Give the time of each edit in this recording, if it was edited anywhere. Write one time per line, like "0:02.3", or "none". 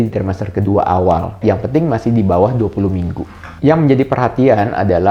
none